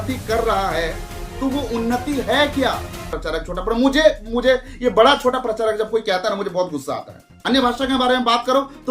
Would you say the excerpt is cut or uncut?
cut